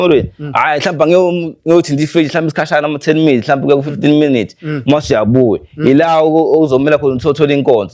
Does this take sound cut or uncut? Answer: uncut